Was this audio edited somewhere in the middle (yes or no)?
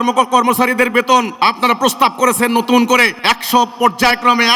yes